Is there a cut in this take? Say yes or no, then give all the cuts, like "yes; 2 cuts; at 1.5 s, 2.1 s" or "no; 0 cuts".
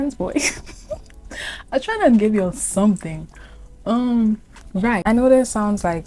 no; 0 cuts